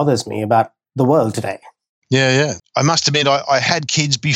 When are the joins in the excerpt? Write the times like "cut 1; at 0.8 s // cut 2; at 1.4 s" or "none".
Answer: cut 1; at 2.6 s